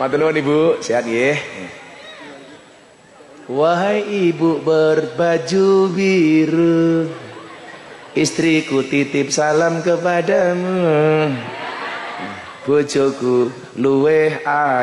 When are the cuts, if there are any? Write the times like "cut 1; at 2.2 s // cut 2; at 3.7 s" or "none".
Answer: none